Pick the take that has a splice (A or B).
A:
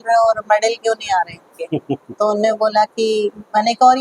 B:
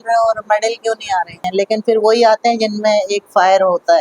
B